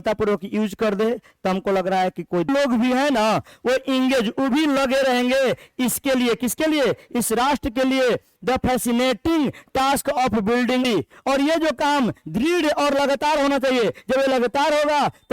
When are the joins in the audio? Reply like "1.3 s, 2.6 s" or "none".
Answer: 2.5 s, 10.8 s